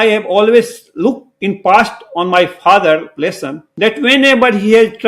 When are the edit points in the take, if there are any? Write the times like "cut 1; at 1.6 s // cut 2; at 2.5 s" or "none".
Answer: cut 1; at 1.3 s